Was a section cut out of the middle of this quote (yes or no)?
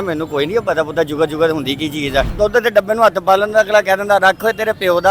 yes